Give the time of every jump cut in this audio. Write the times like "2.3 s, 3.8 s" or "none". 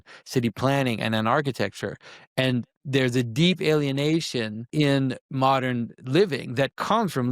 4.6 s